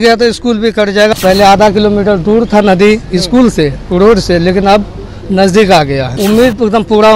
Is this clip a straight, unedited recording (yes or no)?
no